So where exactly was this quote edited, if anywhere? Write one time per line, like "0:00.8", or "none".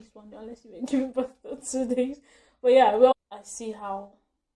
0:03.1